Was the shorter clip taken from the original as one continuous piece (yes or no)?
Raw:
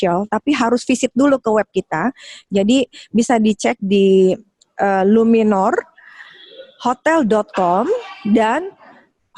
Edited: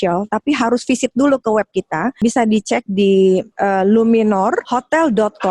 no